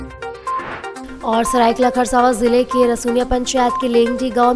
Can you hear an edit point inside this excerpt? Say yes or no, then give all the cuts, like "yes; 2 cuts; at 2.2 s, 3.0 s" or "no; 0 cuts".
yes; 1 cut; at 1.0 s